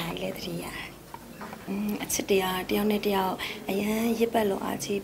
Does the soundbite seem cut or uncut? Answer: cut